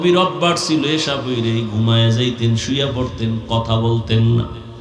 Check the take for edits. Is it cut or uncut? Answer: uncut